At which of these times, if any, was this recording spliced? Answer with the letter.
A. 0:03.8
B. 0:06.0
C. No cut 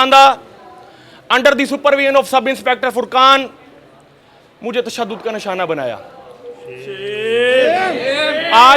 C